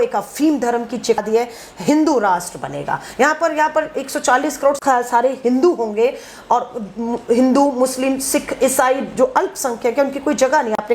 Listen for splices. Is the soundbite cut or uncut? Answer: cut